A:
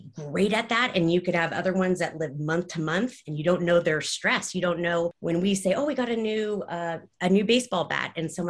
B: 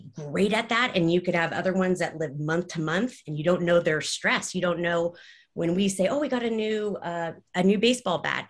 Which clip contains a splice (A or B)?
A